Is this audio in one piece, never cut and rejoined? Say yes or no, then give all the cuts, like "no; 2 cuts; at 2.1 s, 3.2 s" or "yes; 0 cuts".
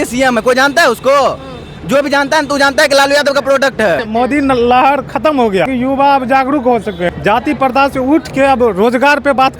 no; 3 cuts; at 4.0 s, 5.7 s, 7.1 s